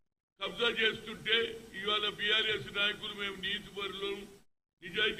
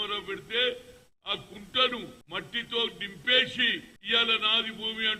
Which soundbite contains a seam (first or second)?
second